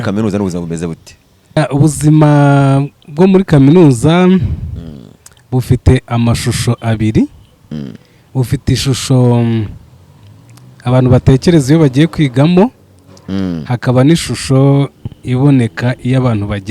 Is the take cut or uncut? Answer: cut